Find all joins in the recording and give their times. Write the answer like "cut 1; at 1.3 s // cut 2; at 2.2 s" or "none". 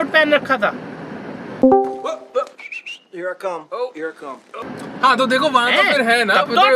none